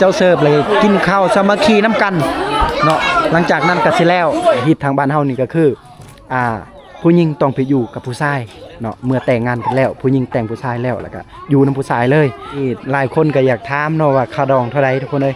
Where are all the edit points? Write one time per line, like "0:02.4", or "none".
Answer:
0:04.6
0:12.7

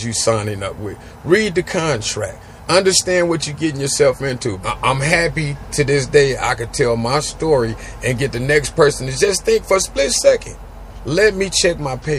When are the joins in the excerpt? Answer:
0:04.6

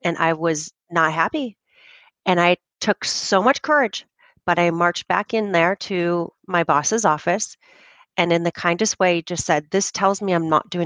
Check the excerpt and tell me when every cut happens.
none

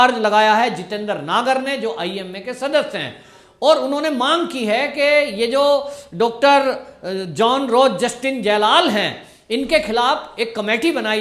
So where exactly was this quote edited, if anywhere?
none

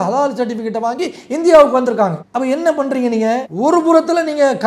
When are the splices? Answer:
0:02.2
0:03.5

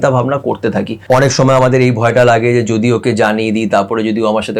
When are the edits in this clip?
0:01.0

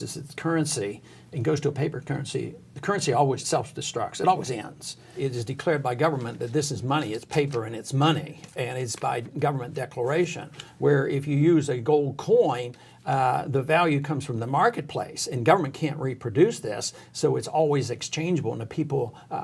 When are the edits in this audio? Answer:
0:03.4
0:05.1

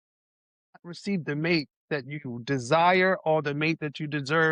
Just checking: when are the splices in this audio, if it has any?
none

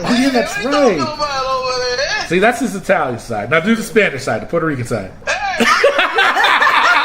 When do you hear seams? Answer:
0:05.2

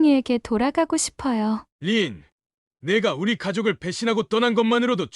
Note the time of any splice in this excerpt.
0:01.7

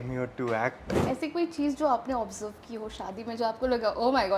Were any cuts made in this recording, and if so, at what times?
0:00.9

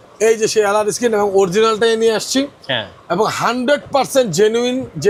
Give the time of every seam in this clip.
none

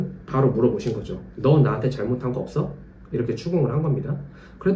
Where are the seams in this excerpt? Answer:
none

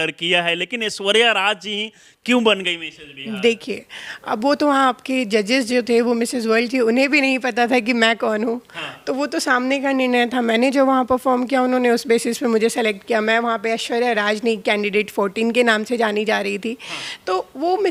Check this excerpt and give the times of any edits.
none

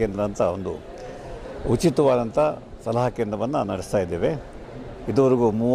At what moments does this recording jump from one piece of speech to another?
none

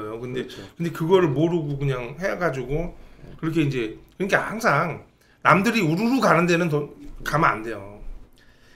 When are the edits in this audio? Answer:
none

